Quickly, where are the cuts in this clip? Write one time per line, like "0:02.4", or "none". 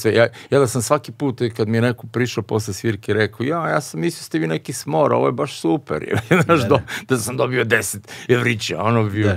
none